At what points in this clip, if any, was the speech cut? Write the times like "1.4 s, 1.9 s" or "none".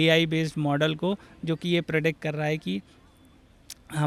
none